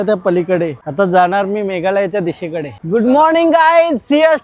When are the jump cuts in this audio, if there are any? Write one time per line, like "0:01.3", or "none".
none